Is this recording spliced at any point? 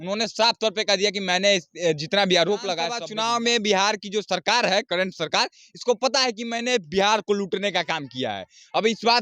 yes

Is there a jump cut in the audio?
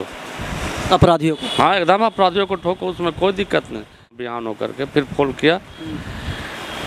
yes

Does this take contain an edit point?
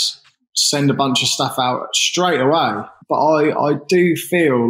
yes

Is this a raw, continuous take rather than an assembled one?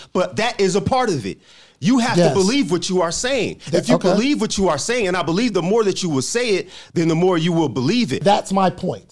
no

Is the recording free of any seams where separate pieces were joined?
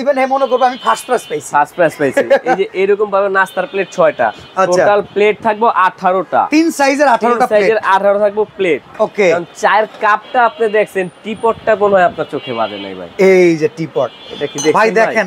yes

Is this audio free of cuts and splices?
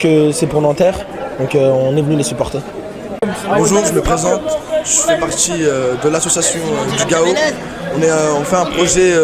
no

